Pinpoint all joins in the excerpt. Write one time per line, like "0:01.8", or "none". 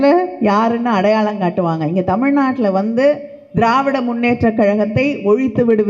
none